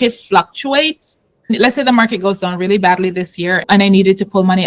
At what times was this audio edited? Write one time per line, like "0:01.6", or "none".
0:01.5
0:03.6